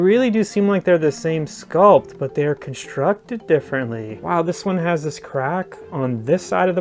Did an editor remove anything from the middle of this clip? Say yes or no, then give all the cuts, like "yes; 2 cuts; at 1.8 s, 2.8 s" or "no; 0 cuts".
no; 0 cuts